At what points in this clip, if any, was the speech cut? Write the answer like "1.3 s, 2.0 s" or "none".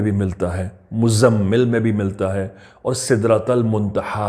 none